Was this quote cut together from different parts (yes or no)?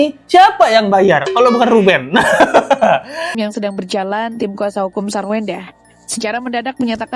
yes